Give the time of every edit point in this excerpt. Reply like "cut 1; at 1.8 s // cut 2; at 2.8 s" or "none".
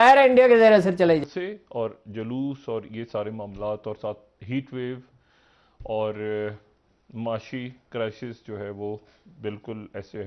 cut 1; at 1.2 s